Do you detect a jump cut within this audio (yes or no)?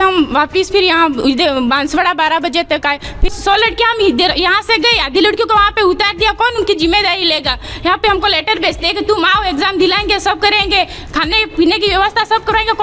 no